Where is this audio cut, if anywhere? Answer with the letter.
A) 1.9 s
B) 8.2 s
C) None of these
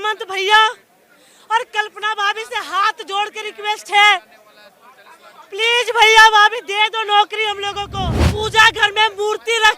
B